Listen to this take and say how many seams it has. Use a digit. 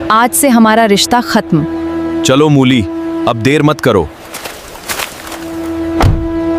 0